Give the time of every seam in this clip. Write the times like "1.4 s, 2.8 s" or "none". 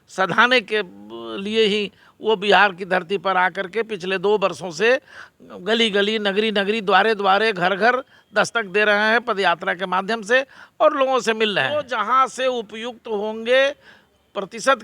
11.9 s